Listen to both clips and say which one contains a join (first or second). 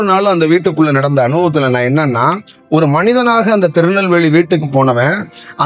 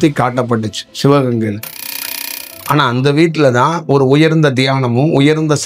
second